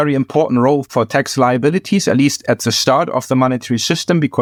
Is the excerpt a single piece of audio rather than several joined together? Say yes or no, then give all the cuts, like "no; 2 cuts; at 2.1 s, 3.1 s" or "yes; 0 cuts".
yes; 0 cuts